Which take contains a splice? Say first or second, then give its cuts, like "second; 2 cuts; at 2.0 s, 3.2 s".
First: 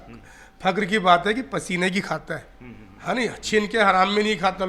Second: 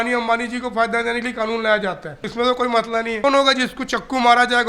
second; 2 cuts; at 2.2 s, 3.2 s